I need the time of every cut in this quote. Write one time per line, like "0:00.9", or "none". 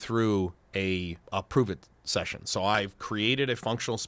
0:02.8